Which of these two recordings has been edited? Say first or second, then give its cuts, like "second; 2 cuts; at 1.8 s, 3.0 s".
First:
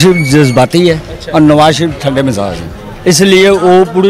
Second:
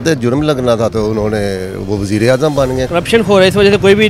second; 1 cut; at 2.8 s